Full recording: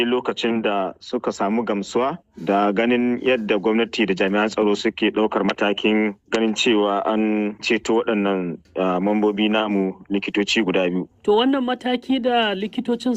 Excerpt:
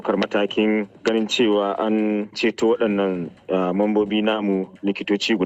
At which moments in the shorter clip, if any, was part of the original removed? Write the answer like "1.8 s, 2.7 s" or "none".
none

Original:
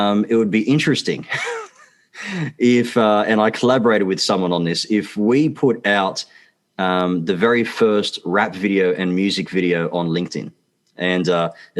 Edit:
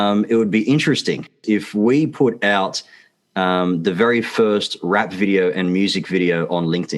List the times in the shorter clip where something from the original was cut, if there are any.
1.4 s

